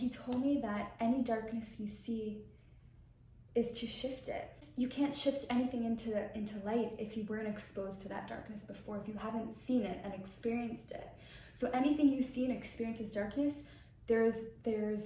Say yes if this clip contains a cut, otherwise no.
yes